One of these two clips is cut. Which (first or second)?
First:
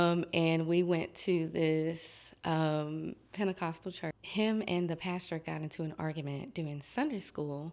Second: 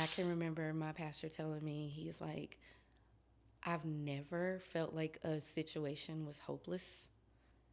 first